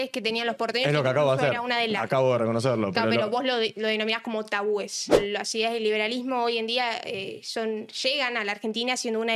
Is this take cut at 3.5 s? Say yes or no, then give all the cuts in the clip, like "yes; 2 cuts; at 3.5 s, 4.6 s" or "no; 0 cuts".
no; 1 cut; at 5.2 s